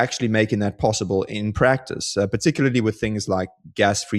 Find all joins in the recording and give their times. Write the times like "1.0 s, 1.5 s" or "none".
none